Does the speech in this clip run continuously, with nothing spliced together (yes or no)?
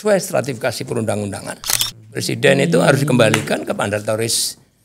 no